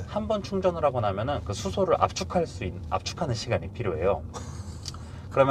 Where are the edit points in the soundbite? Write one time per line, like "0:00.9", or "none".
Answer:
none